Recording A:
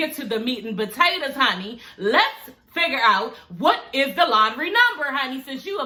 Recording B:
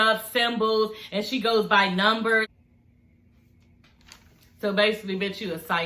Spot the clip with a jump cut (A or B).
B